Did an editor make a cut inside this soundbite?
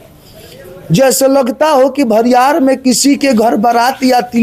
no; 0 cuts

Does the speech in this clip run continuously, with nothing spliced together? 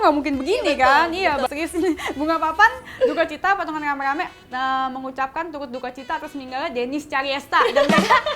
no; 1 cut; at 1.5 s

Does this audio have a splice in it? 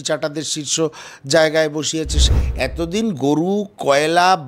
yes; 1 cut; at 2.2 s

